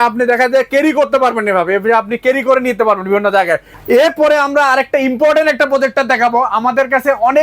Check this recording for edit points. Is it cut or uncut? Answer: cut